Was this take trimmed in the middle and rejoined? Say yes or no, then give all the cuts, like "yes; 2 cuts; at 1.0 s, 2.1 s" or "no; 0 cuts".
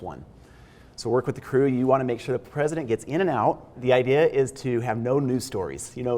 yes; 1 cut; at 3.8 s